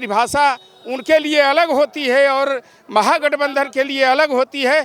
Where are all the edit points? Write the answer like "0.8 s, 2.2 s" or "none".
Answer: none